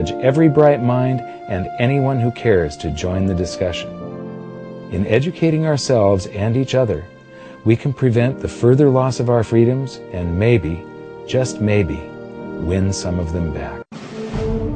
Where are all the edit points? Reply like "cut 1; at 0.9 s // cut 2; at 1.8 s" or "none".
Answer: cut 1; at 13.9 s